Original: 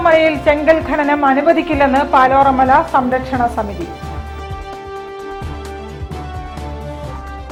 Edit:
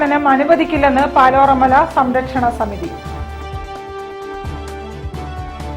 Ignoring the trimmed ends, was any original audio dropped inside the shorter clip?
no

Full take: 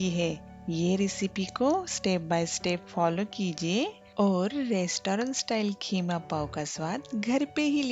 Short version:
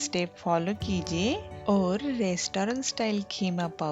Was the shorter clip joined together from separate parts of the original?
no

